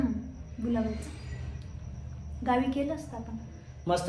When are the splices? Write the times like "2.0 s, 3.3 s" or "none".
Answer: none

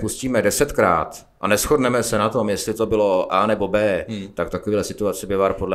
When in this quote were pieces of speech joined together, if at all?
none

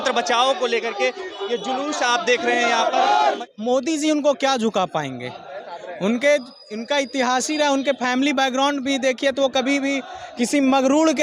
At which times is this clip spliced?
3.4 s

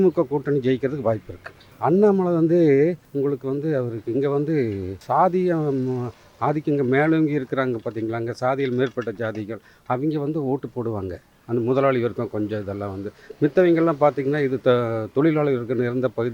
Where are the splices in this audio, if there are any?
3.0 s, 5.0 s

